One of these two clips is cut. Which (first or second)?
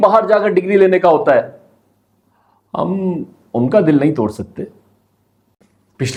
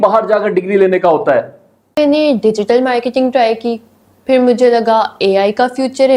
second